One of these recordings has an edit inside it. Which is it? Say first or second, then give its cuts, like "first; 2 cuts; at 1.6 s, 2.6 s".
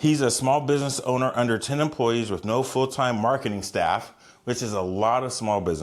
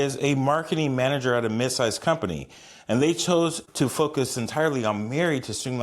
second; 1 cut; at 3.6 s